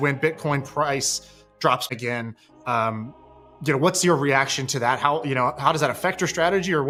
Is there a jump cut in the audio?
no; 0 cuts

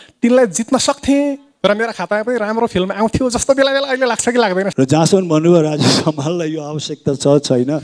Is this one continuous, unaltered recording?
no; 1 cut; at 4.7 s

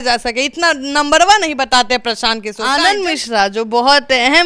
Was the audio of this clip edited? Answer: yes; 1 cut; at 2.5 s

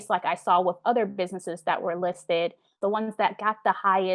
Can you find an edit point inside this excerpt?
yes; 1 cut; at 2.8 s

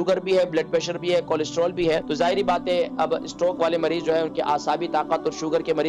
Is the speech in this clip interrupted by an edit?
yes; 1 cut; at 2.1 s

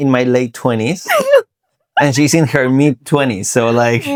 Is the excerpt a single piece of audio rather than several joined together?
yes; 0 cuts

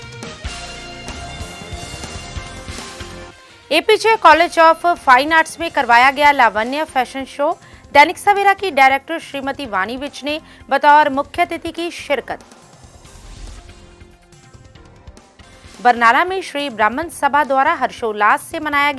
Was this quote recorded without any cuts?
no; 1 cut; at 3.2 s

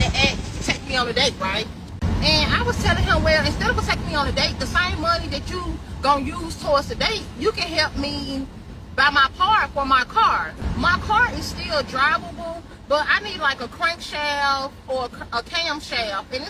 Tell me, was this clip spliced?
no; 0 cuts

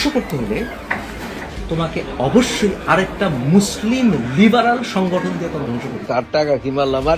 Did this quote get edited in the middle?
yes; 1 cut; at 5.8 s

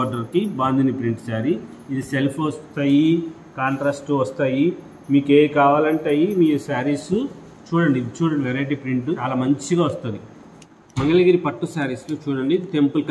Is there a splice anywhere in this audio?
yes; 2 cuts; at 9.2 s, 10.8 s

